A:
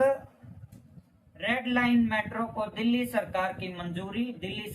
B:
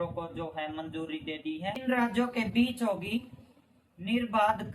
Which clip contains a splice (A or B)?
B